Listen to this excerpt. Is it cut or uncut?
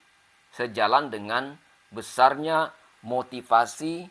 uncut